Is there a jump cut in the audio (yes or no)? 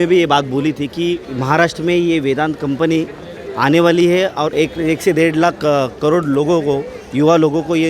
yes